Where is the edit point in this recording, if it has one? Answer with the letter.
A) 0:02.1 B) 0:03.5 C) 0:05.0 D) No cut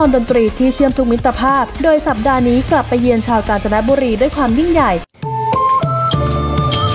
C